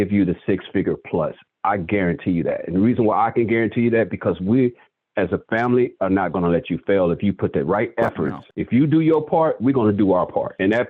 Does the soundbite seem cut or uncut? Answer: uncut